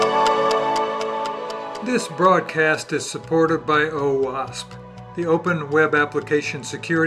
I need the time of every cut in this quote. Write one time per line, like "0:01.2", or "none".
0:01.7